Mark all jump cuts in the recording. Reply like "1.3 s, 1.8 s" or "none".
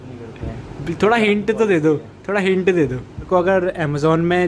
3.3 s